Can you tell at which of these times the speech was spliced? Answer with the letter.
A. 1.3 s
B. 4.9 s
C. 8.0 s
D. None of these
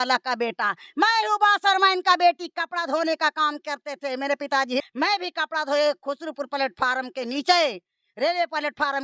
B